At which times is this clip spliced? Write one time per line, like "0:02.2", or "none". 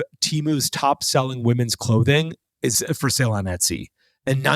0:02.8